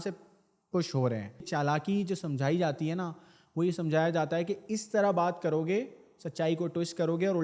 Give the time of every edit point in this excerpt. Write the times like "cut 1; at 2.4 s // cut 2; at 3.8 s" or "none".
cut 1; at 1.5 s